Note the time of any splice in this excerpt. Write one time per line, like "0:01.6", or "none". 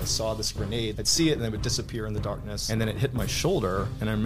0:01.0
0:02.5